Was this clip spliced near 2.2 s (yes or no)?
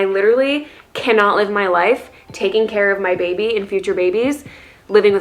no